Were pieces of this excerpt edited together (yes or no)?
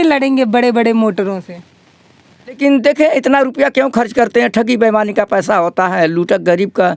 yes